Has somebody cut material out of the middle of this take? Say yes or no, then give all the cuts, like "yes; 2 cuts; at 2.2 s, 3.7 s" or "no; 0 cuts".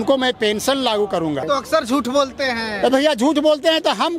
yes; 1 cut; at 1.4 s